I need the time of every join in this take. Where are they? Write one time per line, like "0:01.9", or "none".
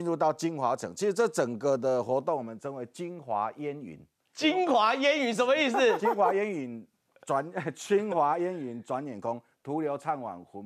none